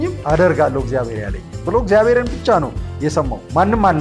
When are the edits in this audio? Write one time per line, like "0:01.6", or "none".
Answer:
none